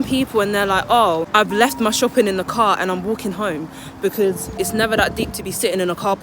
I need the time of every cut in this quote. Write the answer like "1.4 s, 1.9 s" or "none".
1.3 s, 4.6 s